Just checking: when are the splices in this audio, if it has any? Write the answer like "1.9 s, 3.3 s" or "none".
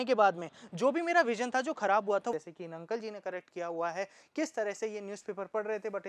2.3 s